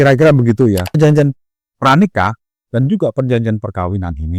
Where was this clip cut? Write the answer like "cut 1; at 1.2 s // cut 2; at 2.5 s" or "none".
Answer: cut 1; at 1.0 s

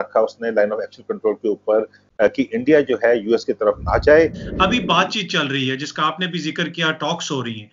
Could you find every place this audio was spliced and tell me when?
cut 1; at 4.4 s

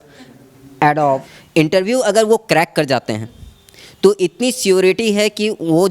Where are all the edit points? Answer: cut 1; at 1.3 s

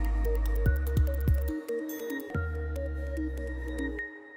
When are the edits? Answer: cut 1; at 2.3 s

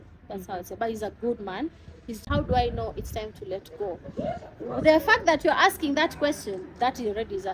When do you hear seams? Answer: cut 1; at 2.2 s

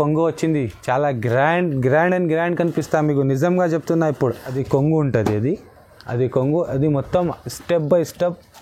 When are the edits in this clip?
cut 1; at 4.5 s

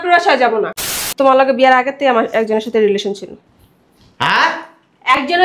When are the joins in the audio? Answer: cut 1; at 1.0 s

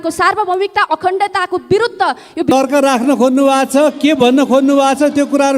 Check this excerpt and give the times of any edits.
cut 1; at 2.5 s

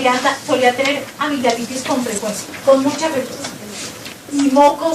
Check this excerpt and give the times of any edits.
none

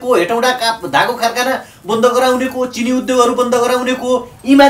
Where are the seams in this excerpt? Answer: none

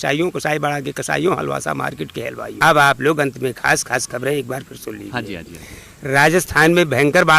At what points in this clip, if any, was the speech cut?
cut 1; at 2.5 s

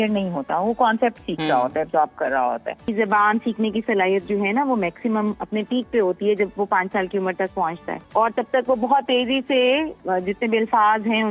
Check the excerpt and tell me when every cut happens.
cut 1; at 2.9 s // cut 2; at 7.9 s // cut 3; at 10.0 s

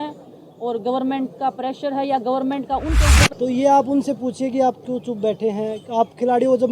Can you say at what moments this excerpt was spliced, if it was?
cut 1; at 3.2 s

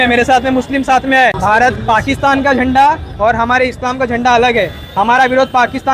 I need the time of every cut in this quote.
cut 1; at 1.4 s

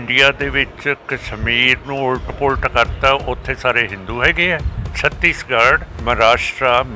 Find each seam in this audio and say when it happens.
cut 1; at 4.8 s // cut 2; at 5.9 s

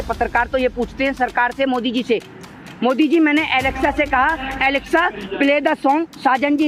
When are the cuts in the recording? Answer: none

